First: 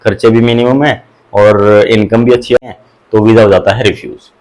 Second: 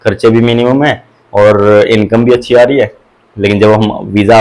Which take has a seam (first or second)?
first